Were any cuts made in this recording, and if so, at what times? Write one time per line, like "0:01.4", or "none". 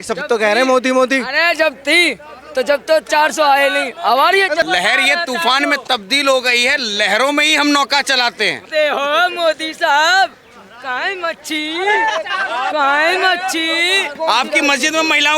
0:04.6
0:08.6
0:14.2